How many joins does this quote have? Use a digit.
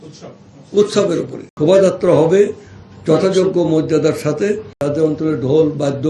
2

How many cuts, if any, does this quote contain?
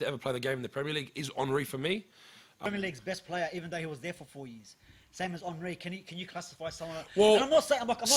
1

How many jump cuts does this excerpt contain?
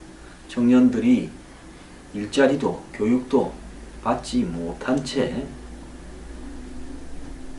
1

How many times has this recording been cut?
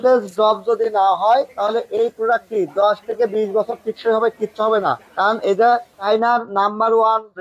0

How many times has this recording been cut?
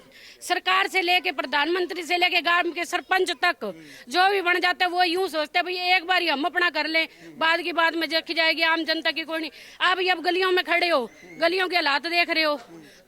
0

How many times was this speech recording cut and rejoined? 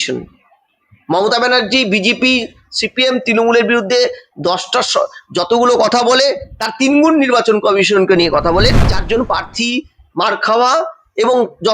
1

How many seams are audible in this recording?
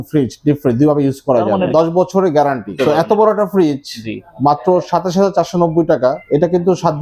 3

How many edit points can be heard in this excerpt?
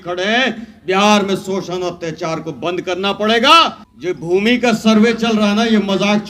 1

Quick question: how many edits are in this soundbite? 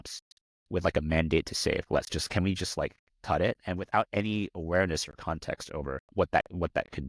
2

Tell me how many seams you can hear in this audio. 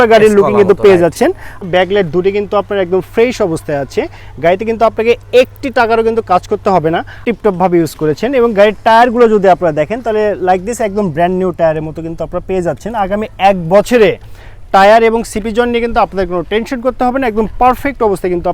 2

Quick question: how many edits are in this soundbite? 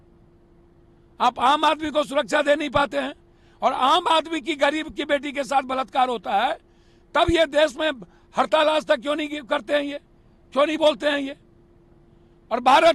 0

